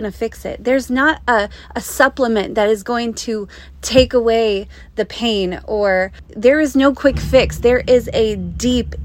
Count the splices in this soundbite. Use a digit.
1